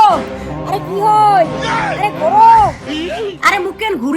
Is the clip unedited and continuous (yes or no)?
yes